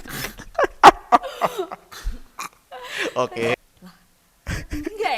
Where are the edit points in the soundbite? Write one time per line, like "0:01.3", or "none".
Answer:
0:03.6